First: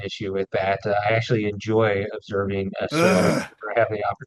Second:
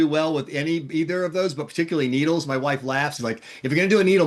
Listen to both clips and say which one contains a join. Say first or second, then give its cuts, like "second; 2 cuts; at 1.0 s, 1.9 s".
second; 1 cut; at 3.2 s